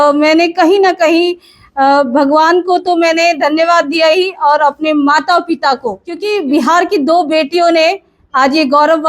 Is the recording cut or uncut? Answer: cut